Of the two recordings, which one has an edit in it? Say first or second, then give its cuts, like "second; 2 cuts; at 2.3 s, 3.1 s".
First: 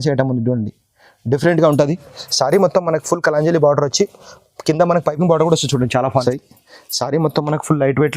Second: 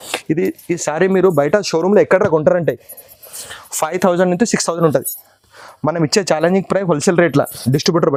first; 1 cut; at 6.2 s